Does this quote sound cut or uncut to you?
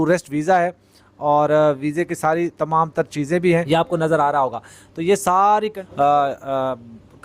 cut